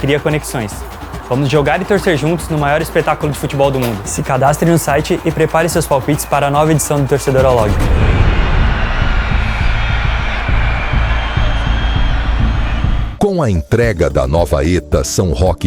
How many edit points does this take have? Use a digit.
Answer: 1